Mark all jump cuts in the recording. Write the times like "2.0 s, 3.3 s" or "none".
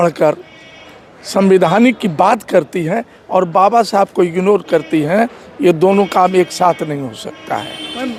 none